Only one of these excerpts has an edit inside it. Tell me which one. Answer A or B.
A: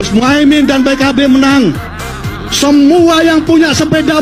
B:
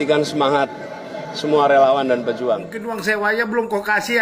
B